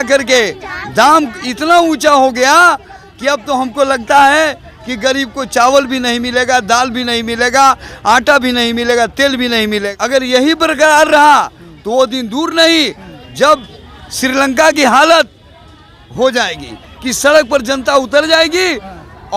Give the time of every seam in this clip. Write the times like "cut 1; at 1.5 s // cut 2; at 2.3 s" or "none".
none